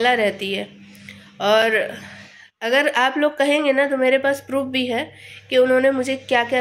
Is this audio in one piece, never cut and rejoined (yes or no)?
yes